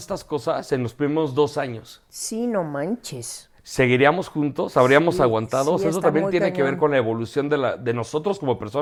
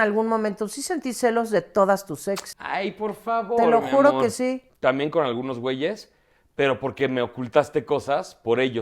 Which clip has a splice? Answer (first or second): second